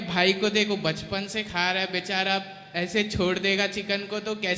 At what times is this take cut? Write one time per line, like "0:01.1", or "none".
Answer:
none